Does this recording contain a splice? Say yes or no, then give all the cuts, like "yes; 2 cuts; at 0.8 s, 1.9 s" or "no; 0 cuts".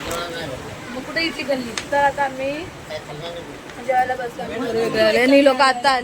no; 0 cuts